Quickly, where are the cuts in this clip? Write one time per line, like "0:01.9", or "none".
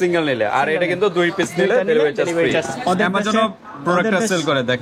0:02.7